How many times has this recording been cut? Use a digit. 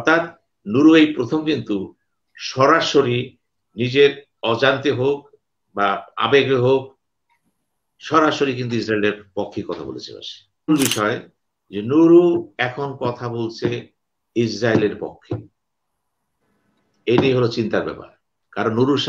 1